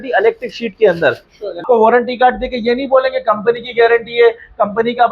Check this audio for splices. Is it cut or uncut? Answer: cut